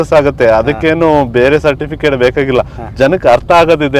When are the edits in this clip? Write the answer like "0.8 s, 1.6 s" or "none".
none